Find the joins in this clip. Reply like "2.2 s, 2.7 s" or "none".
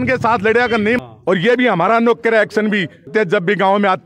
1.0 s, 3.1 s